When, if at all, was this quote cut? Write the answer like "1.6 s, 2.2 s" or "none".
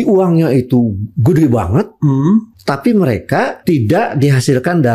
2.6 s, 3.6 s